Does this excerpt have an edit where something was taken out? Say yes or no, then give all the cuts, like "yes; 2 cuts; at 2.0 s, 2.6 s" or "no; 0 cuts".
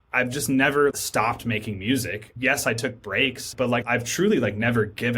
yes; 3 cuts; at 0.9 s, 2.3 s, 3.7 s